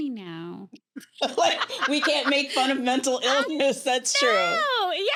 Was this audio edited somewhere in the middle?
no; 0 cuts

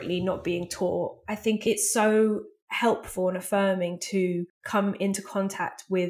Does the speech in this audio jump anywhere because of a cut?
yes; 2 cuts; at 1.6 s, 4.6 s

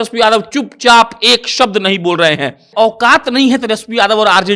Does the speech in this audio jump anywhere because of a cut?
yes; 1 cut; at 2.6 s

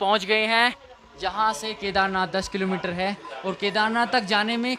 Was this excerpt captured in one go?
yes; 0 cuts

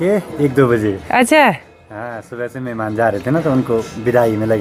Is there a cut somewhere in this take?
no; 0 cuts

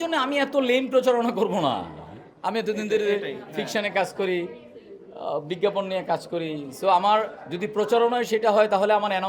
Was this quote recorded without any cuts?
yes; 0 cuts

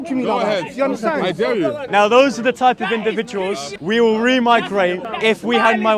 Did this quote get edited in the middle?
yes; 3 cuts; at 1.8 s, 3.7 s, 5.1 s

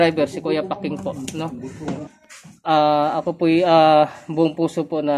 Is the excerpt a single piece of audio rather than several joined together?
no; 1 cut; at 2.0 s

